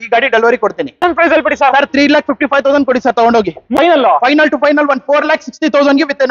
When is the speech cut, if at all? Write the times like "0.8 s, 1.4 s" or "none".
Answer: 1.0 s, 3.7 s